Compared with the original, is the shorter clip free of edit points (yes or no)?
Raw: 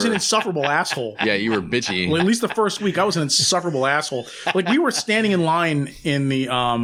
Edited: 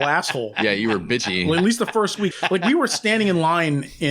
no